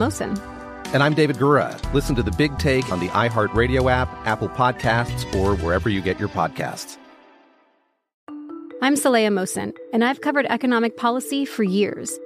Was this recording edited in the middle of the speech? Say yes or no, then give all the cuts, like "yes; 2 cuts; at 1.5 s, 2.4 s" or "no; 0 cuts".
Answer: yes; 1 cut; at 8.1 s